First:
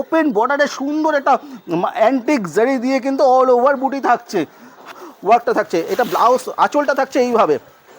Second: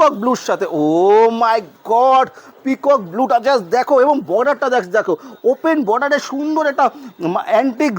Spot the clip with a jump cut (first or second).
first